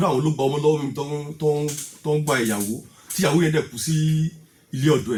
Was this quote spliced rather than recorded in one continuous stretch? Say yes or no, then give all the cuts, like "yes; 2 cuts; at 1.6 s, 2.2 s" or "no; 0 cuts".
no; 0 cuts